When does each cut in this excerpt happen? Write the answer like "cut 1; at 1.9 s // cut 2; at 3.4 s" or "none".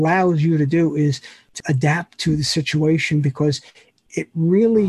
cut 1; at 1.6 s